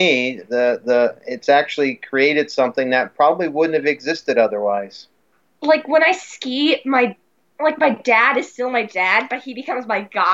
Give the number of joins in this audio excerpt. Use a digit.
0